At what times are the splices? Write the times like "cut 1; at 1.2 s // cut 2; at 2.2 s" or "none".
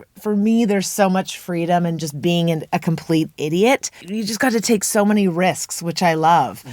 cut 1; at 4.0 s

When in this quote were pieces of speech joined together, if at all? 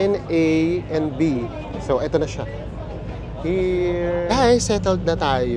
none

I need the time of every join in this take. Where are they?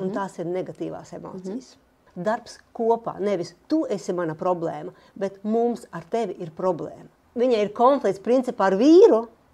cut 1; at 2.1 s // cut 2; at 7.2 s

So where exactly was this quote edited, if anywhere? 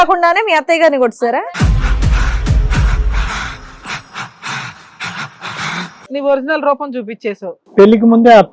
cut 1; at 1.4 s // cut 2; at 6.1 s // cut 3; at 7.6 s

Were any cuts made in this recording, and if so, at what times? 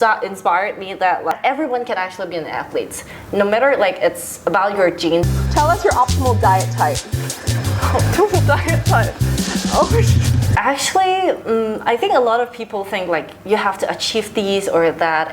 cut 1; at 1.3 s // cut 2; at 5.3 s // cut 3; at 10.4 s

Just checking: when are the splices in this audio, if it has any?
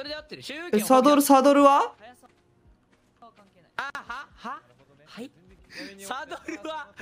none

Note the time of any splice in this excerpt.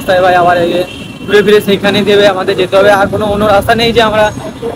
none

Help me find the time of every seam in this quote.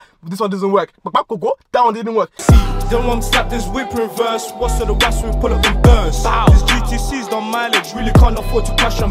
cut 1; at 2.3 s

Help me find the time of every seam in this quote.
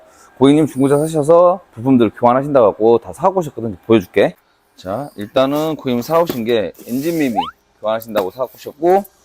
none

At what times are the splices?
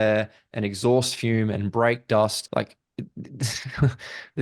cut 1; at 2.4 s

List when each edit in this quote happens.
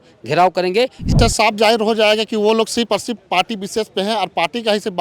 cut 1; at 1.0 s

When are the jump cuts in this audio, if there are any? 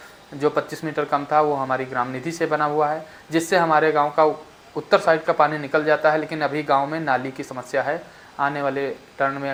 none

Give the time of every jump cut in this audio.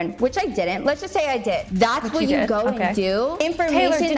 cut 1; at 1.7 s // cut 2; at 3.4 s

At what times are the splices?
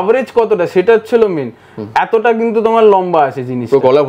none

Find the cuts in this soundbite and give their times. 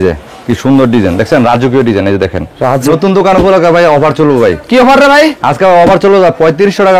cut 1; at 2.9 s

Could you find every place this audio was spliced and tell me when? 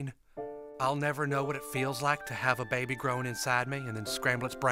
none

